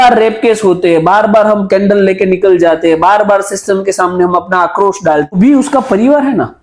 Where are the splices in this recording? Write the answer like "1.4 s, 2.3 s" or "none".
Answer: 5.3 s